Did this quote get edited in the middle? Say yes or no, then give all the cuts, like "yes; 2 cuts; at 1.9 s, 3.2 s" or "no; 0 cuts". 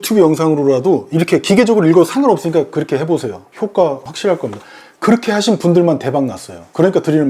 no; 0 cuts